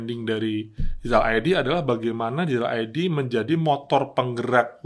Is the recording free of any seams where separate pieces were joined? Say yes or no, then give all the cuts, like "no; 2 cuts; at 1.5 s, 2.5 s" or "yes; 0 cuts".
yes; 0 cuts